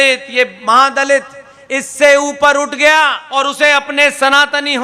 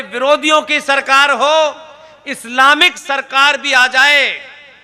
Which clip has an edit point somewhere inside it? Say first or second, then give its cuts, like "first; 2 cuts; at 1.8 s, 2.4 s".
first; 1 cut; at 3.3 s